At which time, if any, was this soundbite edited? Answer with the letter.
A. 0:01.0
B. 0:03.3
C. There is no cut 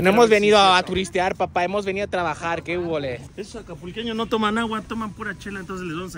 B